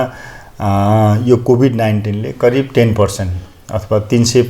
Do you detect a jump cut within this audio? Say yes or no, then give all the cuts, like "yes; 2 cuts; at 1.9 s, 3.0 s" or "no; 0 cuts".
no; 0 cuts